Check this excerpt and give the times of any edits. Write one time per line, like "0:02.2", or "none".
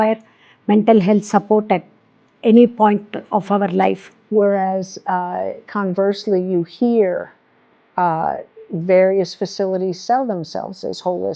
0:04.1